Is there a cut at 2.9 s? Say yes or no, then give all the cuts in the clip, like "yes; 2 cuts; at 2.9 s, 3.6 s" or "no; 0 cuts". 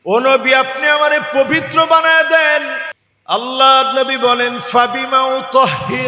yes; 1 cut; at 2.9 s